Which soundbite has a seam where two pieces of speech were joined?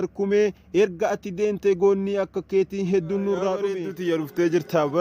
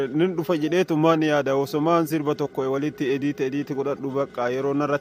first; 1 cut; at 3.7 s

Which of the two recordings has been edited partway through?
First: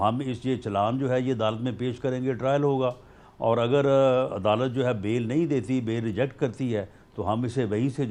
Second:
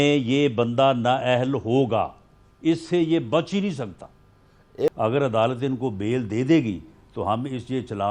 second; 1 cut; at 4.9 s

